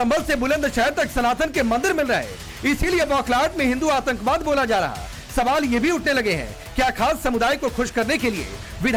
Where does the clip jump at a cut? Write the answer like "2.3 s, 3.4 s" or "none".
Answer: none